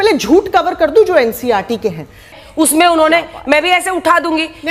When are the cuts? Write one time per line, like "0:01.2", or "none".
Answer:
0:02.4